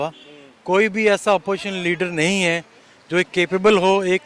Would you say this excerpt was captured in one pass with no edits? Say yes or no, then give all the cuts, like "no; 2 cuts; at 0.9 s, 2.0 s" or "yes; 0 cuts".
yes; 0 cuts